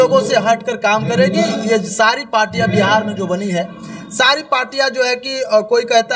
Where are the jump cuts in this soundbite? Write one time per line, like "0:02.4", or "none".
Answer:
none